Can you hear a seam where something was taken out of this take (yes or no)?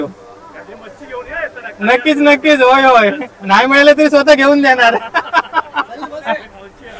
no